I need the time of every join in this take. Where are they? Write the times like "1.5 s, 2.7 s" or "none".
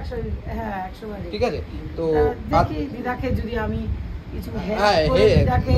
none